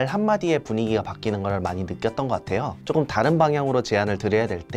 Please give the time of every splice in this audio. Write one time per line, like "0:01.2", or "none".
0:02.8